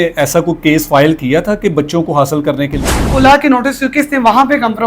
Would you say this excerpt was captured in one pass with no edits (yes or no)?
no